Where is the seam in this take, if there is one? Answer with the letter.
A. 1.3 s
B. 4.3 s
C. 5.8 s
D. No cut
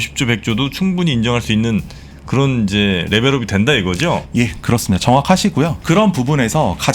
C